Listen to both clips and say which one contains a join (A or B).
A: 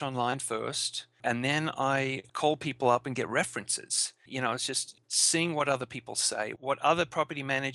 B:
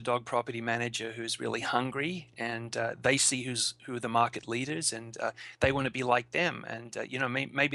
A